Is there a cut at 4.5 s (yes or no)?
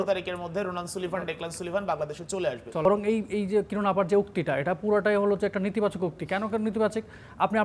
no